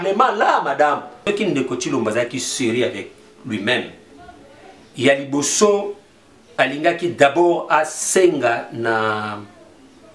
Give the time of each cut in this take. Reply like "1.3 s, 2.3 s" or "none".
1.1 s